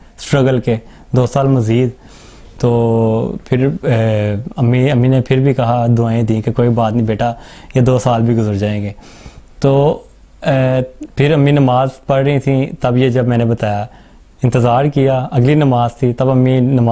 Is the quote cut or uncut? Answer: uncut